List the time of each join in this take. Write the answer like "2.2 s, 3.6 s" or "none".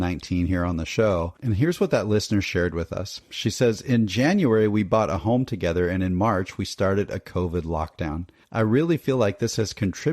1.4 s, 8.4 s